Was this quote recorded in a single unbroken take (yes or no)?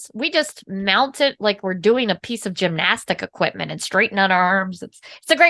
yes